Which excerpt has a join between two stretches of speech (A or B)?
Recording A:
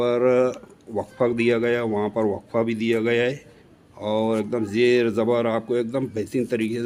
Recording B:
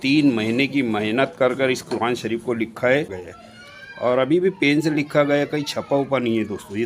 B